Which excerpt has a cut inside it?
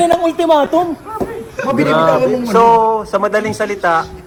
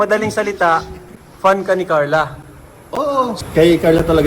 second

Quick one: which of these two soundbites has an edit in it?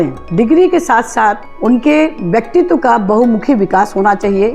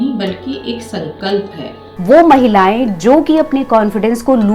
second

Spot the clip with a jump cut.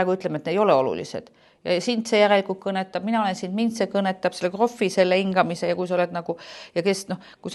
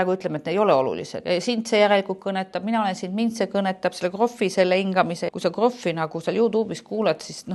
second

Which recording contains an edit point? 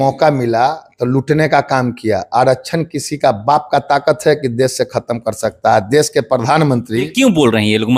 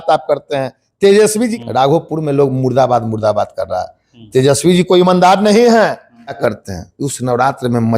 second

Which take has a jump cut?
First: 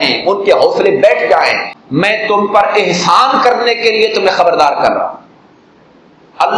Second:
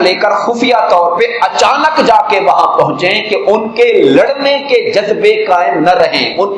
first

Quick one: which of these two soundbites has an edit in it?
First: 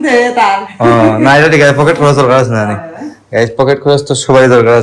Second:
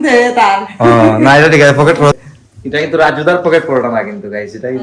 second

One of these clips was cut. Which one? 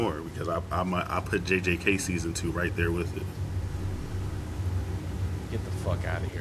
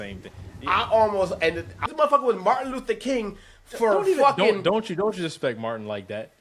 second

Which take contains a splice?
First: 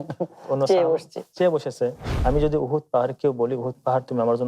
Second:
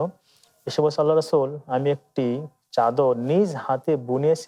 first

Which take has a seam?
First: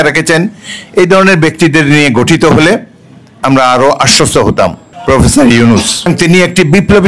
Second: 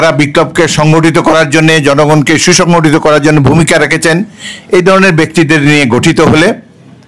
first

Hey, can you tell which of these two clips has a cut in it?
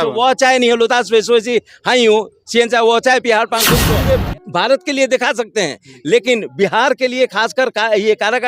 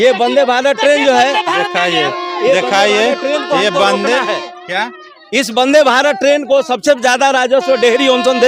first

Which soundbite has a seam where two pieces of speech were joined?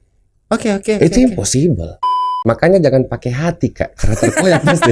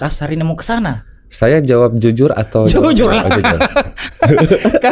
first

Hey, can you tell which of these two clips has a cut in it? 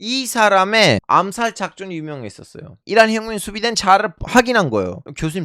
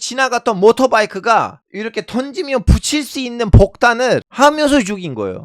first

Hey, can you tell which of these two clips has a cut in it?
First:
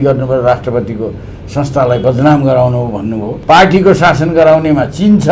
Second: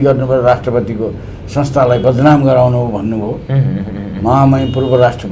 first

